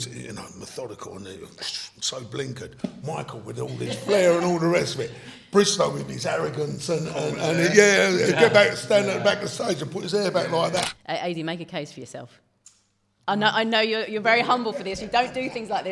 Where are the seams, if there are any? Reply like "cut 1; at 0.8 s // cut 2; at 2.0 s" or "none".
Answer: cut 1; at 10.9 s

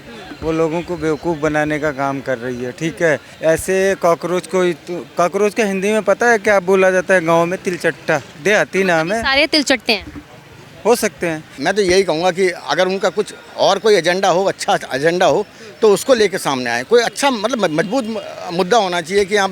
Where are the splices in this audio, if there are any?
cut 1; at 3.3 s // cut 2; at 8.3 s // cut 3; at 11.6 s

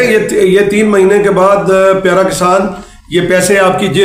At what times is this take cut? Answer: none

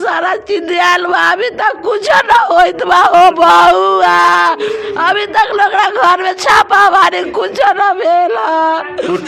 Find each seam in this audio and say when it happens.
none

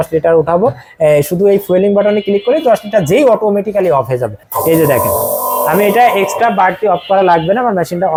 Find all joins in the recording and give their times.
none

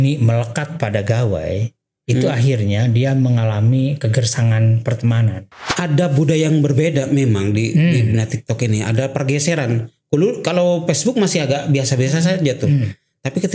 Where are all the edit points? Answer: cut 1; at 5.5 s

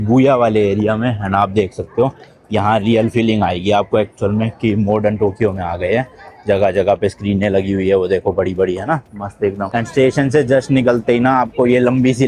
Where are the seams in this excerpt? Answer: none

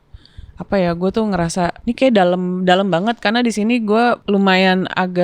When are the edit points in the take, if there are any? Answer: cut 1; at 1.8 s // cut 2; at 4.2 s

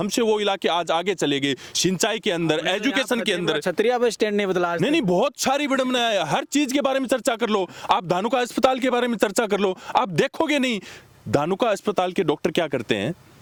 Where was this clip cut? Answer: none

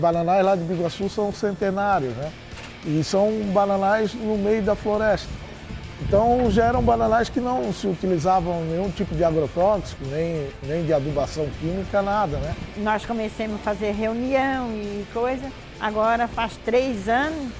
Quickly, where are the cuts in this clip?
cut 1; at 12.6 s

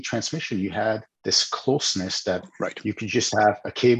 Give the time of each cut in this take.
cut 1; at 1.1 s

